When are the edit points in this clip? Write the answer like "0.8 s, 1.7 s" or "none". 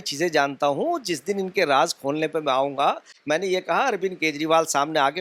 none